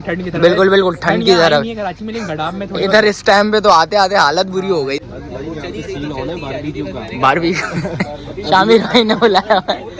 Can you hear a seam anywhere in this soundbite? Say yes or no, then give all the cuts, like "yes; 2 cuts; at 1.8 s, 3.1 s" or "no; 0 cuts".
yes; 1 cut; at 5.0 s